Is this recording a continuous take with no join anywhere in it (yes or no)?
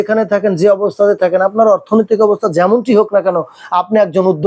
yes